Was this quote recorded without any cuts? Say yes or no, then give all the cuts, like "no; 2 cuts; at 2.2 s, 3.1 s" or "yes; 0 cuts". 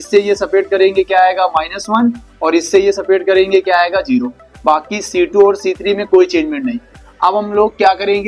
yes; 0 cuts